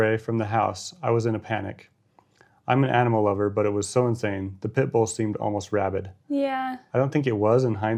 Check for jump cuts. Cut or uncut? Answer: uncut